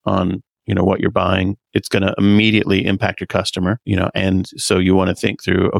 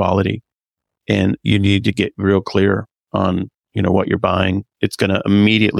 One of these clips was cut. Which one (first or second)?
first